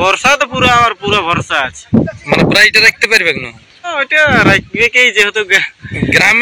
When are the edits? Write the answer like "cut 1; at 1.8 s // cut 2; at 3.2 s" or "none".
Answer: cut 1; at 3.9 s